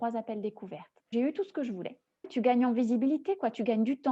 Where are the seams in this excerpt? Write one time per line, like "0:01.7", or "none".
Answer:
0:01.1
0:02.3